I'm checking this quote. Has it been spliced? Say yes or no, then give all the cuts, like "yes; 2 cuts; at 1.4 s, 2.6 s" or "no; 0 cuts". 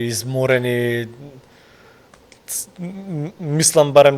no; 0 cuts